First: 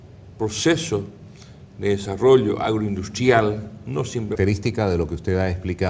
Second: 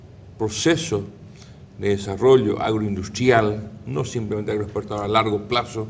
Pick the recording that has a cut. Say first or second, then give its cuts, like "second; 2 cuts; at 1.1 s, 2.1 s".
second; 1 cut; at 4.3 s